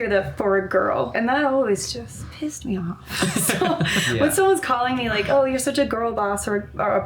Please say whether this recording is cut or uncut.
cut